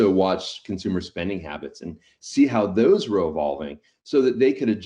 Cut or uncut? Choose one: uncut